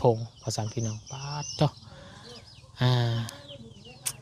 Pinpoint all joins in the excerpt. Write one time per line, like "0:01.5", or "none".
none